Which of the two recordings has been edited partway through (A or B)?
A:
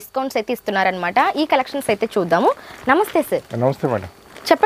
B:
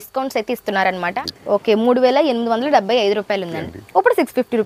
B